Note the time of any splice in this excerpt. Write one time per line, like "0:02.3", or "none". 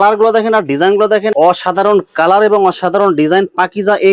0:01.3